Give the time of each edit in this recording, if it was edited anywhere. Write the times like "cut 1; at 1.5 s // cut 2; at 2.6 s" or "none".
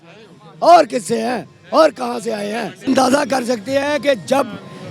cut 1; at 2.8 s